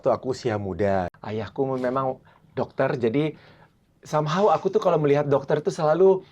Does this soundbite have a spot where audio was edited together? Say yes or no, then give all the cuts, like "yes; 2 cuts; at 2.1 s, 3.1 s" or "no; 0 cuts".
yes; 1 cut; at 1.1 s